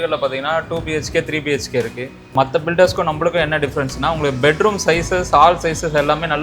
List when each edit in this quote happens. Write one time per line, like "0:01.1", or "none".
0:02.3